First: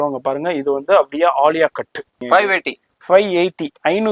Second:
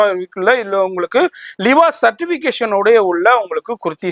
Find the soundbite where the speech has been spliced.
first; 1 cut; at 2.2 s

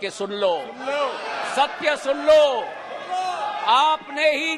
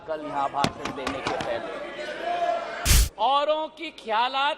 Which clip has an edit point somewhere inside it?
second; 1 cut; at 2.9 s

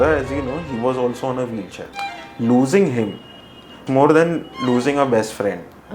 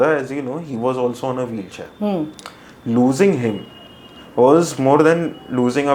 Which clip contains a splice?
first; 2 cuts; at 1.9 s, 3.8 s

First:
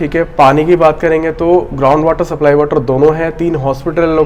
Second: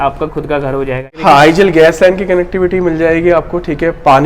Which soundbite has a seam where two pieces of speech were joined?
second; 1 cut; at 1.1 s

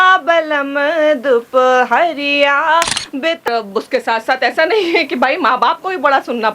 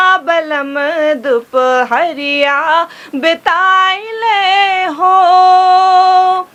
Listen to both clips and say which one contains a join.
first; 1 cut; at 3.5 s

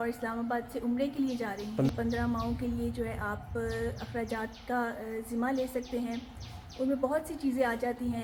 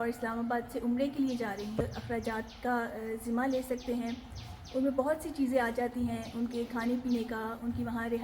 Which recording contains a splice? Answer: second; 1 cut; at 1.8 s

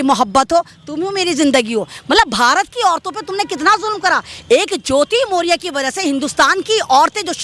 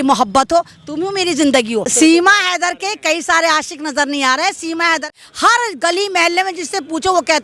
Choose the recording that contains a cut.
second; 2 cuts; at 1.9 s, 5.1 s

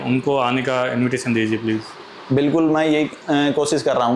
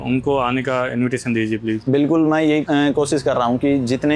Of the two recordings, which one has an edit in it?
second; 2 cuts; at 1.8 s, 2.6 s

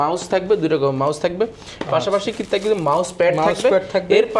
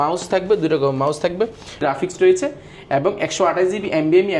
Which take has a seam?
second; 1 cut; at 1.8 s

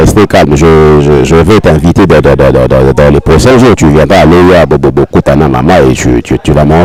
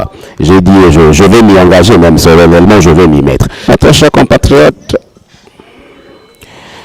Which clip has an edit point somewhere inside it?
second; 1 cut; at 3.5 s

